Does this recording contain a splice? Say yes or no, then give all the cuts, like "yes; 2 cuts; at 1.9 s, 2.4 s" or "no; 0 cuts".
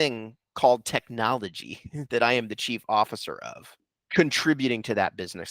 yes; 1 cut; at 3.9 s